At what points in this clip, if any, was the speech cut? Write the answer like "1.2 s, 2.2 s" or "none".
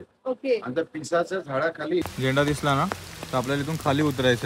2.0 s